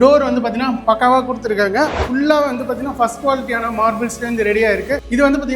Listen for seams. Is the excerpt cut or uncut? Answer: cut